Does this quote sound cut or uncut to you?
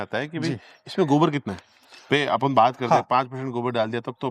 uncut